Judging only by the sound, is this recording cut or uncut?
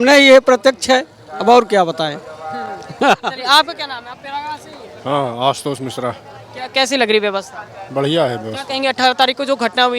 uncut